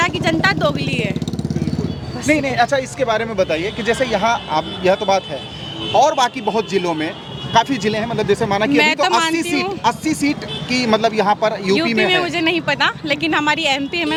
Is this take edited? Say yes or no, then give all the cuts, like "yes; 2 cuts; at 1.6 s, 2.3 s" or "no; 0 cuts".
no; 0 cuts